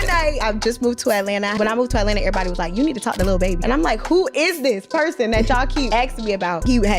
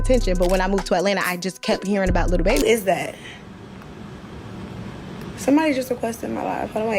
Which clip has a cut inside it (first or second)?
second